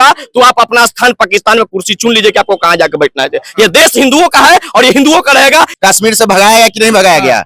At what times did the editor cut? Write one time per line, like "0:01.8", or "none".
0:05.7